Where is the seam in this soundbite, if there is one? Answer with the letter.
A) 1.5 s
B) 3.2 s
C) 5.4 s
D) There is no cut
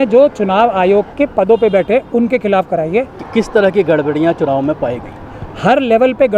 B